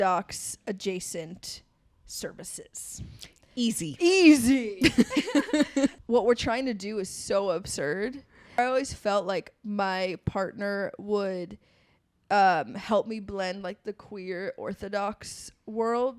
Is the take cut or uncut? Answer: cut